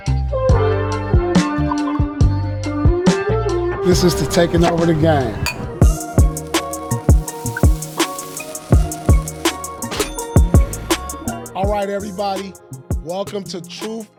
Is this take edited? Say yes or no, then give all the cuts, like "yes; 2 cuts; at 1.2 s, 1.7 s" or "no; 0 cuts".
no; 0 cuts